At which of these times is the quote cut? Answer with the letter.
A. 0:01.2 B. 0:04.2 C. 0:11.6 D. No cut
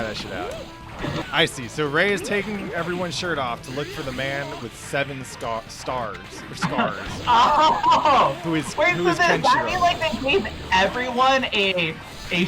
A